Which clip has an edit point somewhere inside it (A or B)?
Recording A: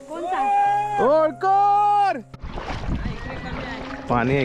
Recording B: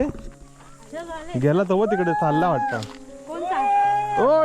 A